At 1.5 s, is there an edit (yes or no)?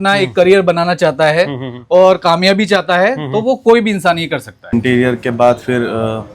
no